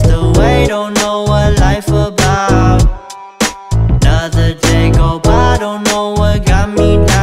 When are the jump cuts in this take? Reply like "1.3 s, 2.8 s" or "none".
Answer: none